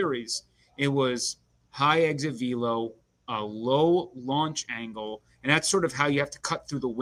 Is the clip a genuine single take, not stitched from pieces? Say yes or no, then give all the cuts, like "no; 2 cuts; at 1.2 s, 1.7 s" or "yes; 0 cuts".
yes; 0 cuts